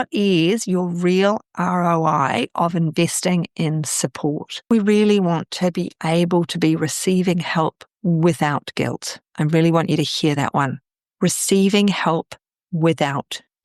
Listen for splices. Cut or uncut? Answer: cut